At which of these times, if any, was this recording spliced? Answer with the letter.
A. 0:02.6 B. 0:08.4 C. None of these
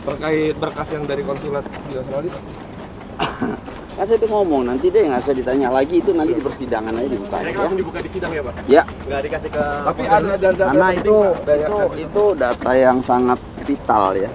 B